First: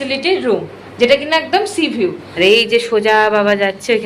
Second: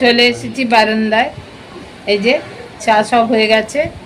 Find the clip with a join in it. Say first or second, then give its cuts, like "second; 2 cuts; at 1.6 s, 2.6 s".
first; 1 cut; at 2.2 s